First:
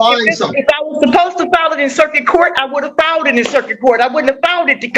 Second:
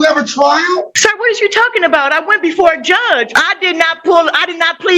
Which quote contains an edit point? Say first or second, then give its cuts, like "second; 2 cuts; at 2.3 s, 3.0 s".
second; 2 cuts; at 0.9 s, 3.3 s